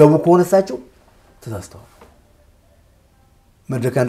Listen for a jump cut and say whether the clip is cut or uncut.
uncut